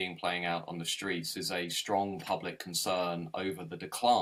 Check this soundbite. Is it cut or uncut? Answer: uncut